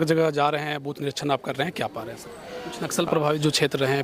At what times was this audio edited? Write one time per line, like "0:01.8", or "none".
0:02.8